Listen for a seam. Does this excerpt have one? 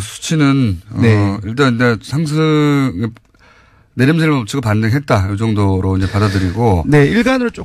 yes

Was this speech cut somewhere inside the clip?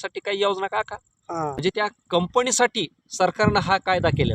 yes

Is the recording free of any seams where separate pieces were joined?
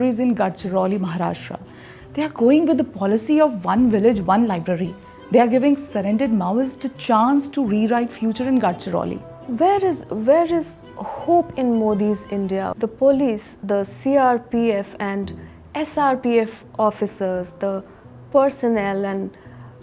no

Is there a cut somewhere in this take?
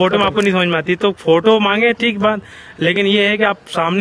no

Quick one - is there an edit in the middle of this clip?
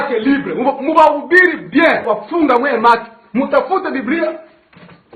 yes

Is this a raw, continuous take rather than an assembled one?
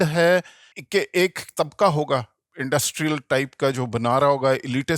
no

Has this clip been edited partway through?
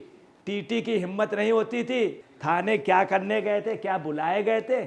yes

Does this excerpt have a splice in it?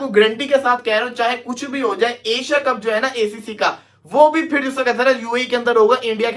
no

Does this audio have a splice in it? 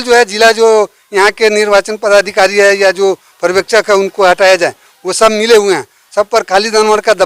no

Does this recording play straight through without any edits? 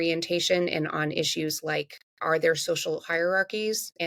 yes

